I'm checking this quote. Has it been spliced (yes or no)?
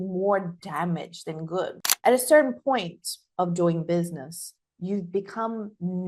yes